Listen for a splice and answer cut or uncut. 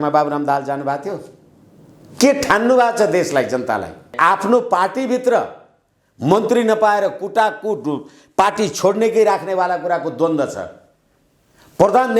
cut